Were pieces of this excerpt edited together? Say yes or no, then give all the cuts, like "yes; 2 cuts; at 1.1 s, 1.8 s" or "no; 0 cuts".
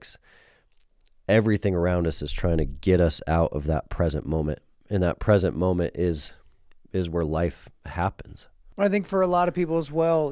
yes; 1 cut; at 8.6 s